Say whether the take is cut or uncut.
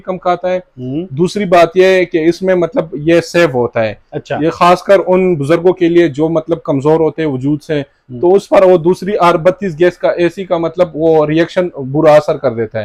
uncut